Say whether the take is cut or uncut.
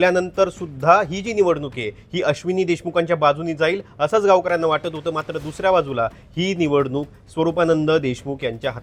uncut